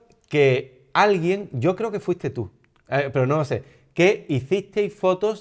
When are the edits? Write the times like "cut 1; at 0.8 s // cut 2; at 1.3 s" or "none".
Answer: none